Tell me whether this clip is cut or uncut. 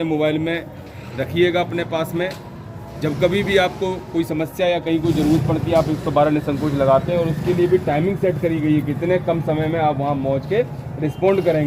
uncut